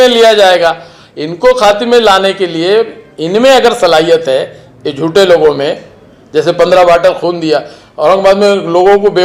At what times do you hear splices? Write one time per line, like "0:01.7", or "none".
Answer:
none